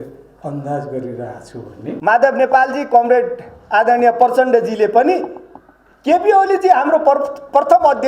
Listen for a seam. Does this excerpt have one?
yes; 1 cut; at 1.8 s

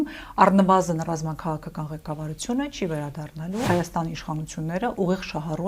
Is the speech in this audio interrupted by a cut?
yes; 1 cut; at 3.7 s

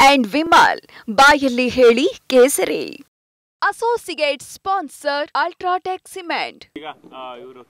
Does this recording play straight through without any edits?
no; 1 cut; at 6.7 s

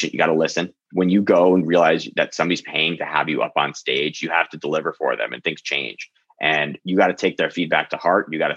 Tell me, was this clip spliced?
no; 0 cuts

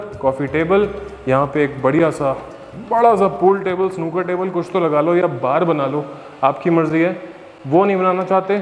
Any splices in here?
no; 0 cuts

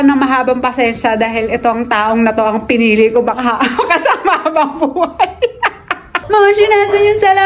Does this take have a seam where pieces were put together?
yes; 1 cut; at 6.1 s

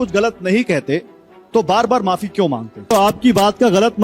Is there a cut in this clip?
yes; 1 cut; at 2.9 s

